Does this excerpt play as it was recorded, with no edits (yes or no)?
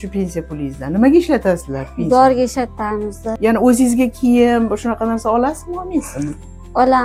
yes